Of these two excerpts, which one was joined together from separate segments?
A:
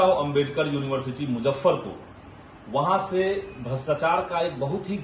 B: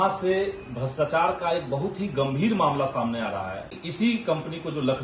B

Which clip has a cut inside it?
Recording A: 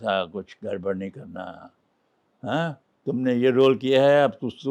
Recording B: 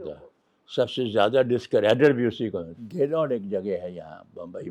B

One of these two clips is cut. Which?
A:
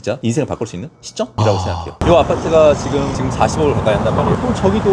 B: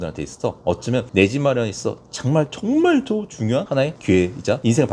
A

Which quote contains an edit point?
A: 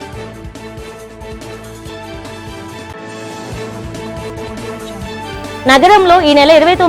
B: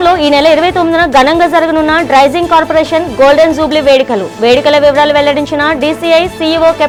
A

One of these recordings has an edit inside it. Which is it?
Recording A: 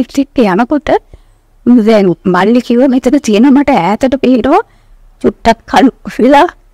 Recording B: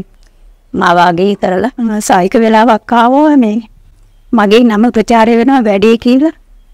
B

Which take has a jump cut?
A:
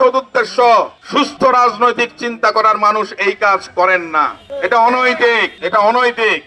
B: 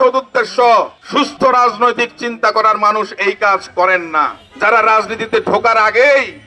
B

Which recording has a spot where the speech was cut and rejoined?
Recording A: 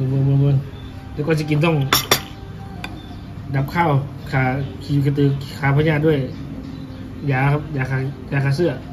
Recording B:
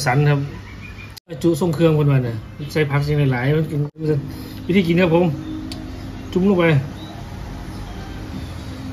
B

